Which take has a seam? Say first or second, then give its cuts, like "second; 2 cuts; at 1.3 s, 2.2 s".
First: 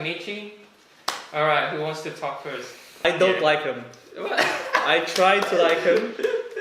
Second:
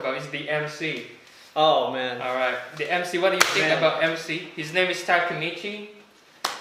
first; 1 cut; at 2.9 s